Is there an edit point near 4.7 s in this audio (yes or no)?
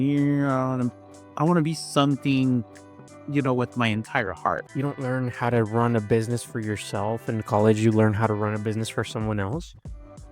yes